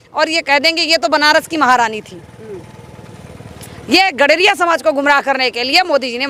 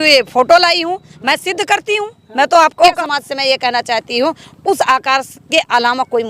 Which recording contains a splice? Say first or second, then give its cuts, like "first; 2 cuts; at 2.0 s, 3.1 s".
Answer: second; 1 cut; at 3.0 s